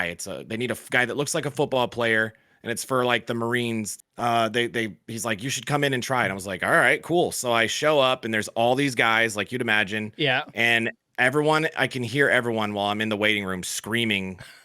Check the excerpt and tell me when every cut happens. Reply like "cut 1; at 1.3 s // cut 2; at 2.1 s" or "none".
cut 1; at 4.0 s